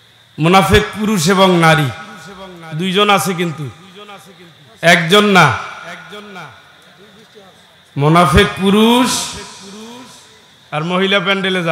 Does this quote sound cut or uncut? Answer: uncut